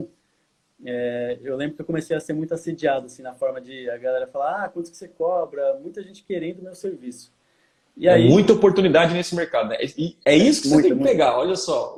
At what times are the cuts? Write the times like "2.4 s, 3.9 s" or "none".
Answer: none